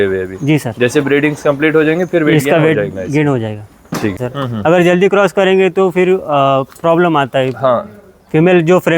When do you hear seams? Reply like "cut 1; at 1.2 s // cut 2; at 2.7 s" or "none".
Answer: cut 1; at 4.3 s